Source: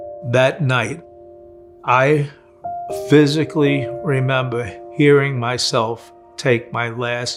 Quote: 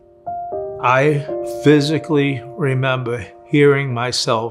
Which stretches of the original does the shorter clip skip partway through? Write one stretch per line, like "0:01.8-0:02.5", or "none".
0:02.5-0:02.9